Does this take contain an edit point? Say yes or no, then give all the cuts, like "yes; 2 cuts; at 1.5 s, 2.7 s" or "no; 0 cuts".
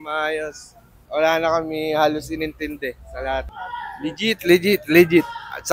yes; 2 cuts; at 1.0 s, 3.6 s